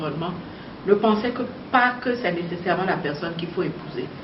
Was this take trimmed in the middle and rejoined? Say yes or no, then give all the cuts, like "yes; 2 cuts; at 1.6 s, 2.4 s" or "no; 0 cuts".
no; 0 cuts